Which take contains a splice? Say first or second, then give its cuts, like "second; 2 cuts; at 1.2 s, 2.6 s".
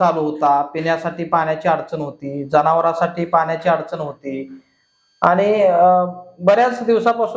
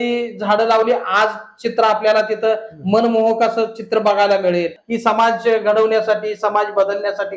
second; 1 cut; at 4.8 s